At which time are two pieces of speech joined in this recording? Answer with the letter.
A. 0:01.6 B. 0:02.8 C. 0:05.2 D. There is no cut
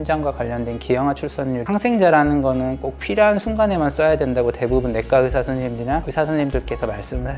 A